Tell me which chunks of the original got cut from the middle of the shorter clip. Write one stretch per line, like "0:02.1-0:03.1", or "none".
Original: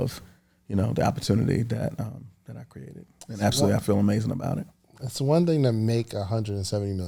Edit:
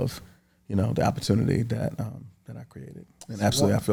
none

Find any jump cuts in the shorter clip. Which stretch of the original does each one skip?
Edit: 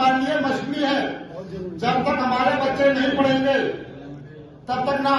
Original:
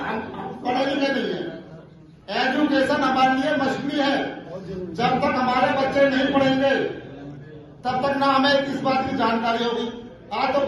none

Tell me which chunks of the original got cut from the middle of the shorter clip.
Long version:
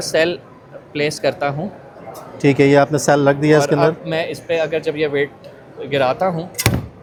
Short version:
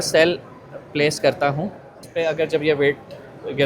0:02.0-0:04.4

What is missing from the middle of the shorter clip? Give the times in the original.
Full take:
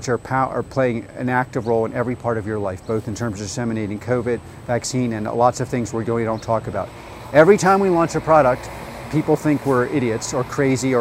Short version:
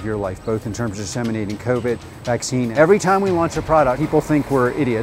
0:05.1-0:07.3
0:08.6-0:09.2

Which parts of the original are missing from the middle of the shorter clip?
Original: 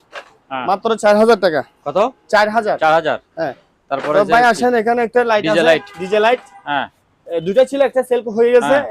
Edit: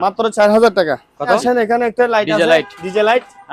0:02.1-0:04.6

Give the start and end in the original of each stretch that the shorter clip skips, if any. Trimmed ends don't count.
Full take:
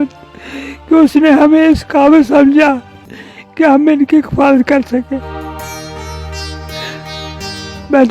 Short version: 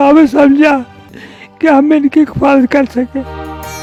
none

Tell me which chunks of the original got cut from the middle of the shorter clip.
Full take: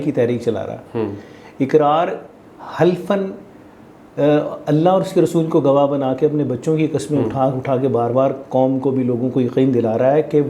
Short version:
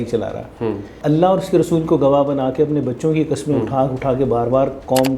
0:01.3-0:04.6

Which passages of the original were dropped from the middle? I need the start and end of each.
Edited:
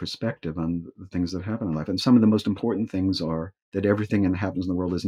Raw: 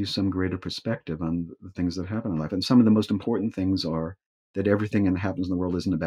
0:04.2-0:04.4

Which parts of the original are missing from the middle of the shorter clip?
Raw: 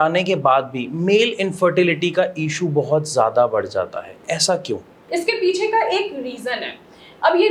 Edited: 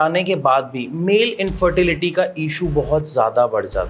none

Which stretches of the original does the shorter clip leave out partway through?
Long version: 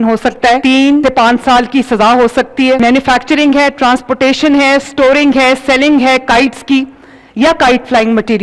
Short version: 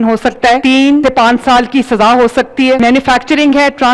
none

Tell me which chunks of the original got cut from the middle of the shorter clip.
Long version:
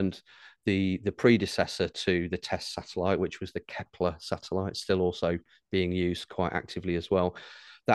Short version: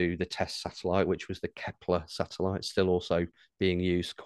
none

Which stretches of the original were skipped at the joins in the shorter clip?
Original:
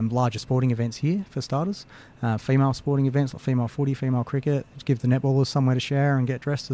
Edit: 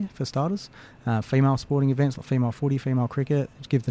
none

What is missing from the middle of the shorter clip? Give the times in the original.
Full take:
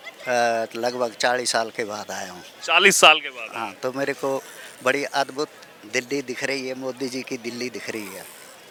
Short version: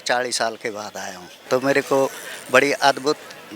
0:02.5-0:03.7

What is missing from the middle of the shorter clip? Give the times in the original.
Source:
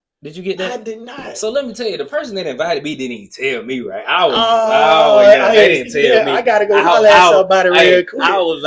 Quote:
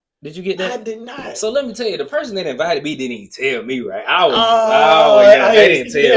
none

